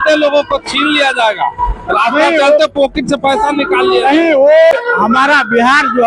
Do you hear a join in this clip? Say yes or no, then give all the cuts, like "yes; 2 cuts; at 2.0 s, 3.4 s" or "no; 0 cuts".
yes; 1 cut; at 4.7 s